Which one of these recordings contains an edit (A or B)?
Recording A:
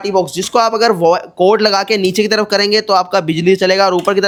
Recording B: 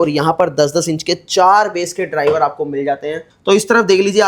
B